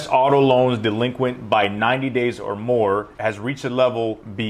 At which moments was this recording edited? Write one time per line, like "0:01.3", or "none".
none